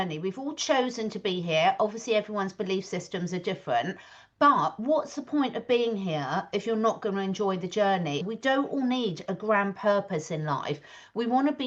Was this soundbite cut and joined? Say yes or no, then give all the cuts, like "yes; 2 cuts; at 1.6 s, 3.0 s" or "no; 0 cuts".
yes; 1 cut; at 8.3 s